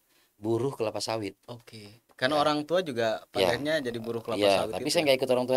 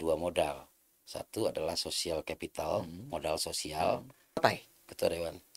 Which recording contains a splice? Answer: second; 1 cut; at 4.4 s

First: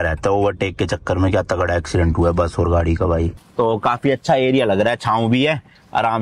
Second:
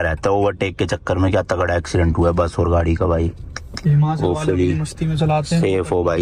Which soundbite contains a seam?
first; 1 cut; at 3.4 s

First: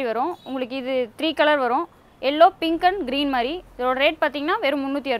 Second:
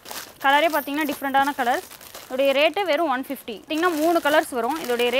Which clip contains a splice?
second; 1 cut; at 3.7 s

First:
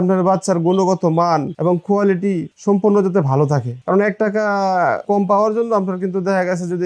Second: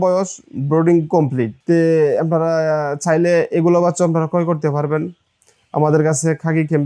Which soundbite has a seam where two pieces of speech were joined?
first; 4 cuts; at 1.4 s, 2.5 s, 3.7 s, 5.0 s

